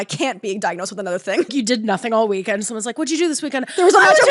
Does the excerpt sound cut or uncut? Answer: cut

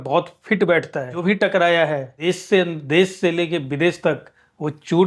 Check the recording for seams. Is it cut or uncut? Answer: cut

